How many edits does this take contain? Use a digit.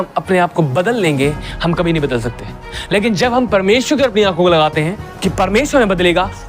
1